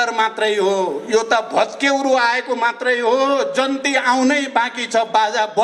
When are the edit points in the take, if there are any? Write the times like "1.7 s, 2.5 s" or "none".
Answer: none